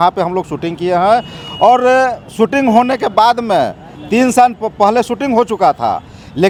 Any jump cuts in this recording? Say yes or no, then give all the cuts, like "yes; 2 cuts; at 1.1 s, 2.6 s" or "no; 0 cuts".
no; 0 cuts